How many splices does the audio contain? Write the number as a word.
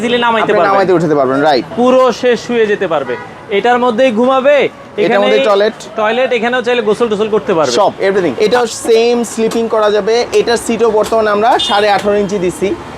two